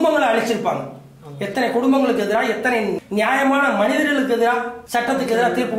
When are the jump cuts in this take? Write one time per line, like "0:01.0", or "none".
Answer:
0:03.0
0:04.8